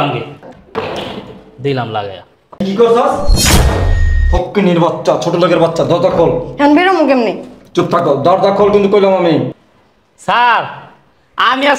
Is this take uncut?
no; 1 cut; at 2.6 s

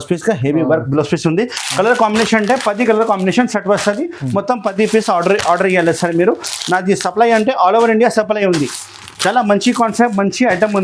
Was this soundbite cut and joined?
no; 0 cuts

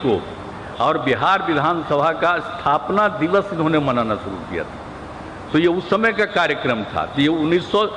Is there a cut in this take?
no; 0 cuts

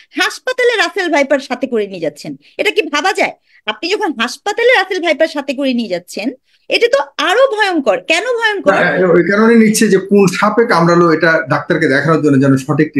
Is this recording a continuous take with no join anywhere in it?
yes; 0 cuts

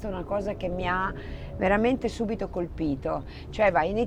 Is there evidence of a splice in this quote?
no; 0 cuts

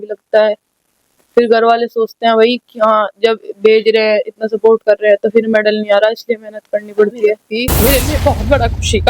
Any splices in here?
yes; 1 cut; at 7.5 s

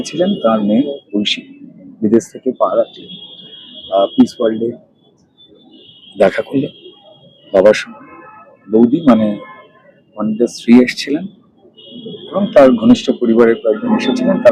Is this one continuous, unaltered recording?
yes; 0 cuts

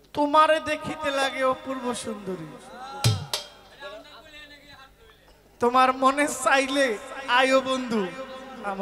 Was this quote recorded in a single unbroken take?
yes; 0 cuts

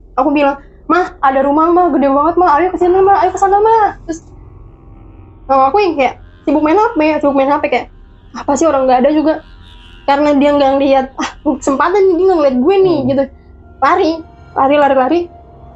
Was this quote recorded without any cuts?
yes; 0 cuts

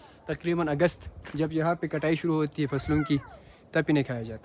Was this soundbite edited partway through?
no; 0 cuts

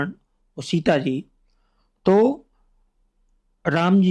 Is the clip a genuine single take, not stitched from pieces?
yes; 0 cuts

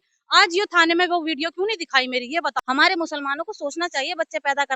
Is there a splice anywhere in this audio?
yes; 1 cut; at 2.5 s

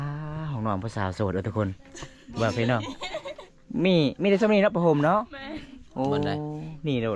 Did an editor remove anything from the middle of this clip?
no; 0 cuts

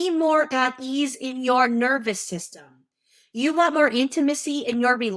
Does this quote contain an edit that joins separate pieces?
no; 0 cuts

